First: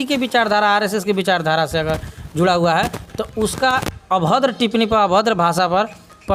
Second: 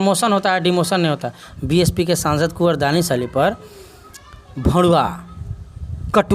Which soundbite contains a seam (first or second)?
second